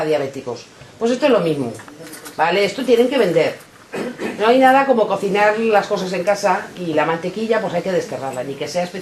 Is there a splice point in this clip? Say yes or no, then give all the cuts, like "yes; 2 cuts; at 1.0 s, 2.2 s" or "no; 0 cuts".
yes; 1 cut; at 1.7 s